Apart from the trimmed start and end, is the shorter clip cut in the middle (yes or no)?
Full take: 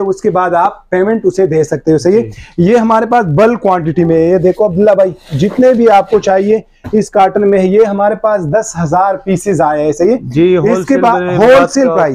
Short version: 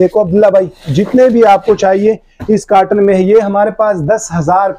no